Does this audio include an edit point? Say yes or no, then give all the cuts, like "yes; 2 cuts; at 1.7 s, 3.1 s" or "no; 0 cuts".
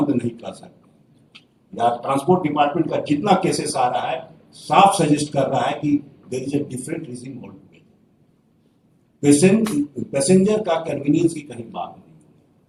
no; 0 cuts